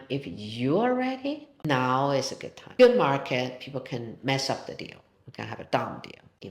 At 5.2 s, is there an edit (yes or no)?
no